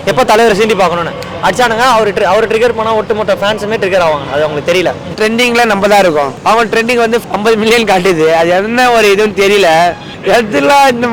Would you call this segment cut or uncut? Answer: cut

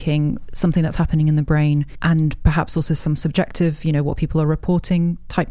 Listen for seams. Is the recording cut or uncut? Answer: cut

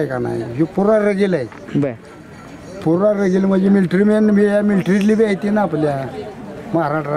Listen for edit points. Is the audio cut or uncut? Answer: uncut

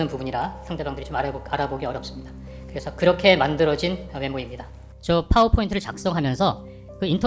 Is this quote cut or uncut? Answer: uncut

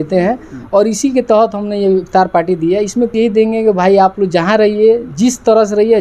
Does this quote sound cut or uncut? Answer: cut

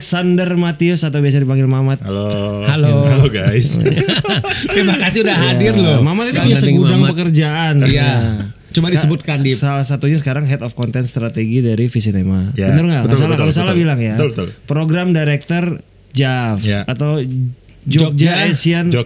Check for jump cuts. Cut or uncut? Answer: cut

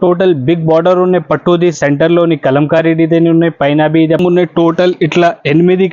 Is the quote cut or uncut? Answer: cut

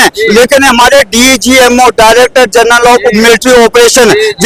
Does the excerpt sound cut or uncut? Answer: uncut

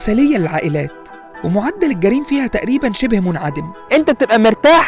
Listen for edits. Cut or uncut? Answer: cut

